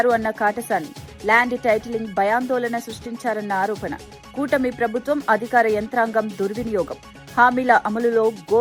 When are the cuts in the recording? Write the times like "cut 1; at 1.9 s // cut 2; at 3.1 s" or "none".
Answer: none

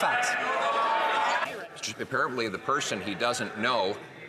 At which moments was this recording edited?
cut 1; at 1.4 s

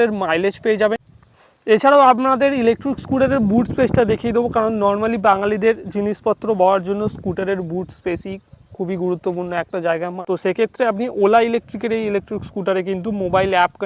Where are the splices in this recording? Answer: cut 1; at 1.1 s // cut 2; at 10.2 s

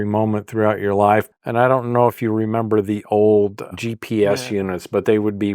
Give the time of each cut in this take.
cut 1; at 1.3 s // cut 2; at 3.7 s

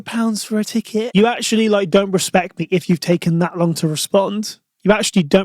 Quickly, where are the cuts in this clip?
cut 1; at 1.1 s

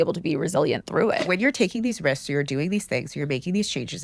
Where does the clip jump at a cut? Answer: cut 1; at 1.3 s

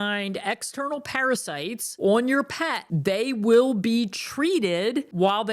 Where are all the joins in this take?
cut 1; at 1.9 s

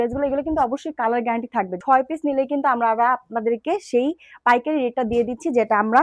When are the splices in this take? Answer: cut 1; at 1.8 s

